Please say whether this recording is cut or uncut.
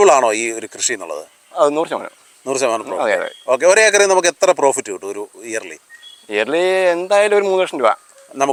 uncut